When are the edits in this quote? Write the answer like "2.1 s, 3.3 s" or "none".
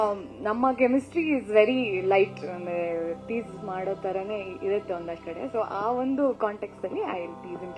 5.2 s